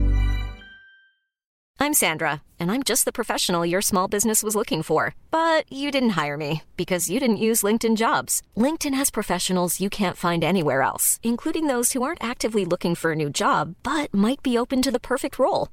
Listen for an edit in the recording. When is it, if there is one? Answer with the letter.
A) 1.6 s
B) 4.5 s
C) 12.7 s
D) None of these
A